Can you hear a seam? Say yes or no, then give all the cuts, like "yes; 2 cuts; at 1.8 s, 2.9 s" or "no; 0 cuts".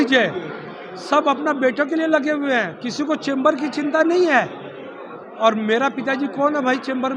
no; 0 cuts